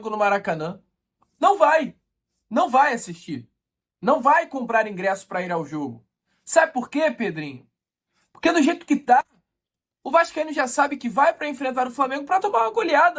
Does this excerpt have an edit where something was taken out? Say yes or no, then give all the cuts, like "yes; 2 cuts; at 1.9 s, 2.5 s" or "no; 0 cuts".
no; 0 cuts